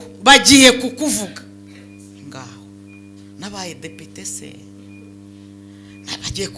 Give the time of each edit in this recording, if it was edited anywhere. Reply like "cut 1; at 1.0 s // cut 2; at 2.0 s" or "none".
none

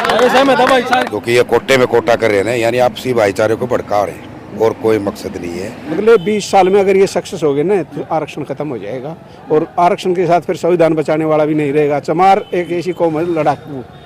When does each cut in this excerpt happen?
cut 1; at 1.1 s // cut 2; at 5.9 s

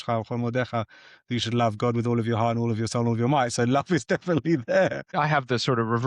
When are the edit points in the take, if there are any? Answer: cut 1; at 5.1 s

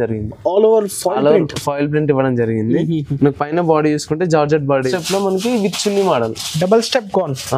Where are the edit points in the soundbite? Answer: cut 1; at 5.0 s

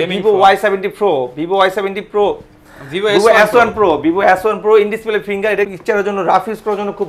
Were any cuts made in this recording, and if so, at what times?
cut 1; at 5.7 s

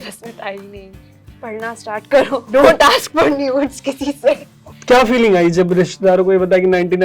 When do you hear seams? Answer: cut 1; at 1.1 s // cut 2; at 2.4 s // cut 3; at 4.6 s

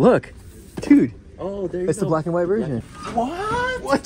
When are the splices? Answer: cut 1; at 3.0 s

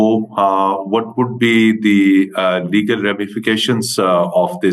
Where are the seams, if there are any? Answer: none

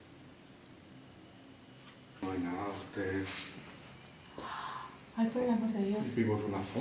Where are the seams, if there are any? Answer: cut 1; at 2.2 s

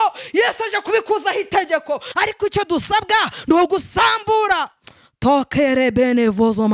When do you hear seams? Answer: cut 1; at 2.1 s

